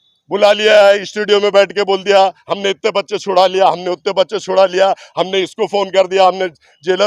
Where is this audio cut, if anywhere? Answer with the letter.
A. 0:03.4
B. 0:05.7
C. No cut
C